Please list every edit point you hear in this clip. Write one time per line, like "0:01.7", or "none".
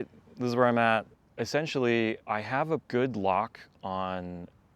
0:01.2
0:02.4